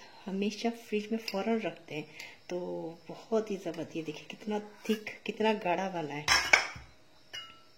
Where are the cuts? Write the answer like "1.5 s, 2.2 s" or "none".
none